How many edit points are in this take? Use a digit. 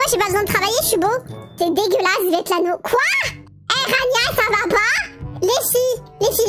2